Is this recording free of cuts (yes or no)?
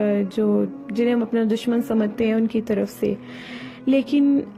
yes